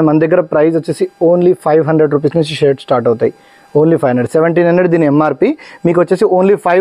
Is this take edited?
no; 0 cuts

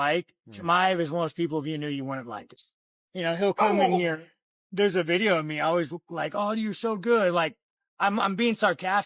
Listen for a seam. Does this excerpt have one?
yes; 1 cut; at 7.3 s

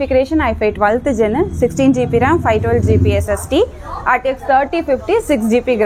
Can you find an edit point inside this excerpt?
no; 0 cuts

